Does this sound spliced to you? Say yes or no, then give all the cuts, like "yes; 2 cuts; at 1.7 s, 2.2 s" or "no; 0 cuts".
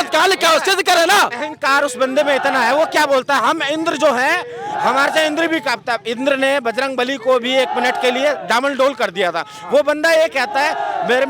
no; 0 cuts